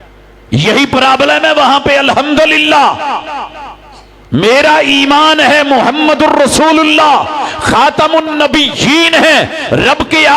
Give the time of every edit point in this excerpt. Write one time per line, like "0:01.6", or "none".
none